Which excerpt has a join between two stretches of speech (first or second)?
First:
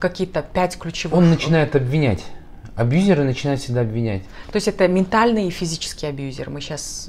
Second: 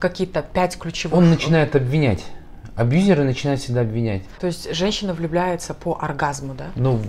second